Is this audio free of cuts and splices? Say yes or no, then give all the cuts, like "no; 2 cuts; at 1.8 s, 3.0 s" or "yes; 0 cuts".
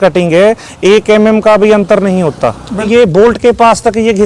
no; 1 cut; at 2.8 s